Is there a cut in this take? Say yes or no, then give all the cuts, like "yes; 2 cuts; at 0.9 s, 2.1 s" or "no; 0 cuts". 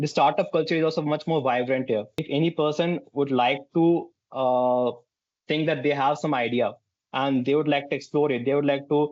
no; 0 cuts